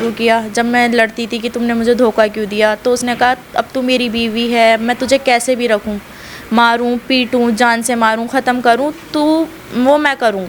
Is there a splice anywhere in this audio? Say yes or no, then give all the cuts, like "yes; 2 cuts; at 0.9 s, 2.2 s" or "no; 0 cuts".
no; 0 cuts